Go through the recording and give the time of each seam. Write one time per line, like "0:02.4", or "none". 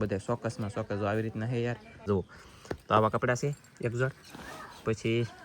0:02.1